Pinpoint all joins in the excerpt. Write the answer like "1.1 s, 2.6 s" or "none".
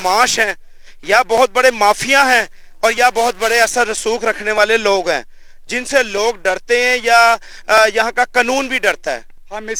none